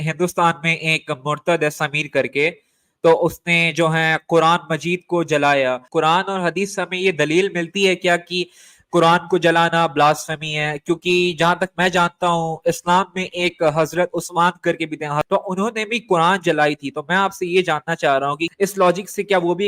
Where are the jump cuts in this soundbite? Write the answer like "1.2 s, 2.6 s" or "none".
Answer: 5.8 s, 15.2 s, 18.5 s